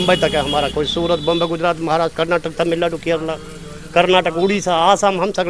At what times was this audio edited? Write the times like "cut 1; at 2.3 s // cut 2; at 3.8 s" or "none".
none